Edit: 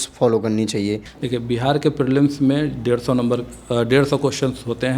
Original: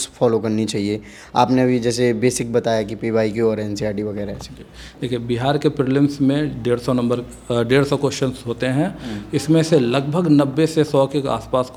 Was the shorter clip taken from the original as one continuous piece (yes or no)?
no